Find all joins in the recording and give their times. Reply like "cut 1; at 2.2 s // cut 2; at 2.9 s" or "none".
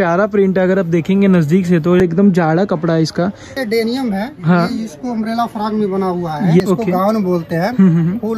cut 1; at 2.0 s // cut 2; at 3.6 s // cut 3; at 6.6 s